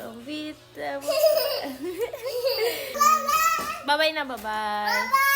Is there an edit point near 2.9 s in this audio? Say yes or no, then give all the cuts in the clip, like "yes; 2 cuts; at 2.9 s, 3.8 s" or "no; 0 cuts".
yes; 1 cut; at 2.9 s